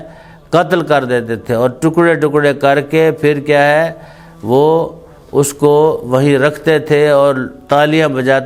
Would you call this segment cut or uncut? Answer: uncut